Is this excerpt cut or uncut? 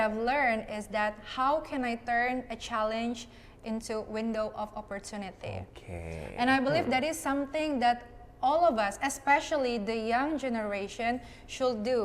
uncut